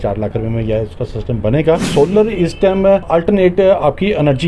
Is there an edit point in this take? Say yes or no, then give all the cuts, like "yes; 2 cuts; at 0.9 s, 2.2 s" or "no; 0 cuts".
yes; 2 cuts; at 1.9 s, 3.1 s